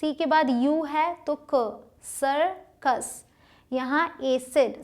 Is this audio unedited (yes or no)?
yes